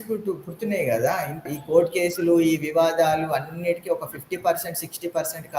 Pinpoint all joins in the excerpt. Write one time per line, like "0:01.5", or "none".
0:01.4